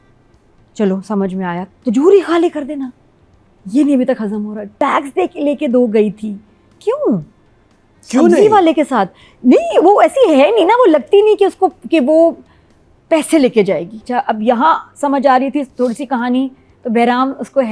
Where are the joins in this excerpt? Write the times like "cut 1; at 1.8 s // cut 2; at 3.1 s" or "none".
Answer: cut 1; at 4.7 s // cut 2; at 14.0 s